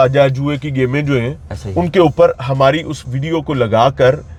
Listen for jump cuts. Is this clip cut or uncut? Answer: uncut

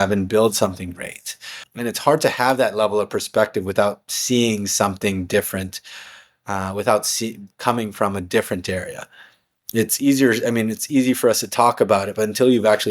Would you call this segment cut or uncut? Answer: cut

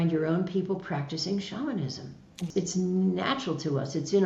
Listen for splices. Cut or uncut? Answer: cut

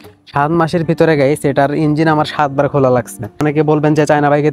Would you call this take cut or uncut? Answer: cut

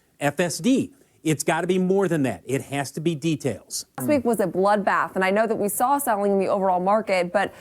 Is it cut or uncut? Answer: cut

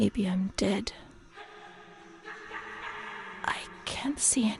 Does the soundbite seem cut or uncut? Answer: uncut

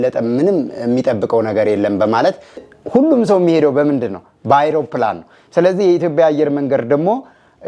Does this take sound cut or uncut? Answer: cut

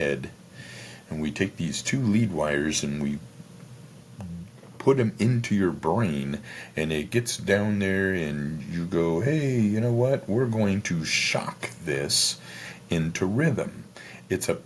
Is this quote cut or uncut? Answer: uncut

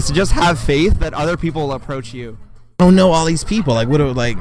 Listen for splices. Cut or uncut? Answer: cut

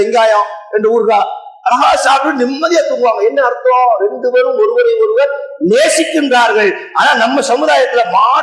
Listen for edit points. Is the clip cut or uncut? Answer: uncut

